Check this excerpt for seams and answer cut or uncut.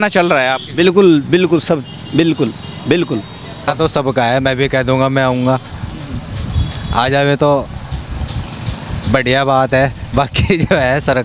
cut